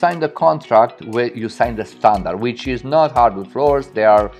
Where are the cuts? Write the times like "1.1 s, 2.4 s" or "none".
none